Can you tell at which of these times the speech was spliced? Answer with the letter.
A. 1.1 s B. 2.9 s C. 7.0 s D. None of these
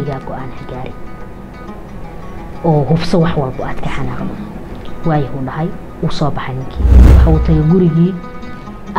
C